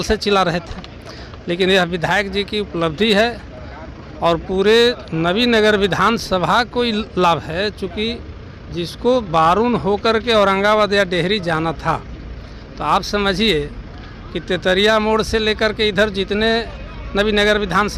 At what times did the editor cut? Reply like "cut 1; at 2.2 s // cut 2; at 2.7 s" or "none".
none